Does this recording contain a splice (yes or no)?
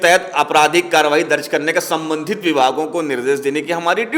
no